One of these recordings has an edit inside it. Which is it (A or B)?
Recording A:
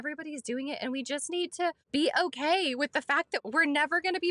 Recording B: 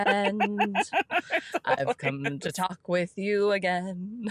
A